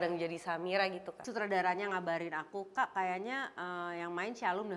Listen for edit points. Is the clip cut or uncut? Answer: cut